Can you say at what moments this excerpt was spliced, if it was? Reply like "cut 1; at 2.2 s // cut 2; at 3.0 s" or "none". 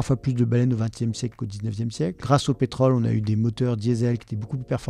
cut 1; at 2.2 s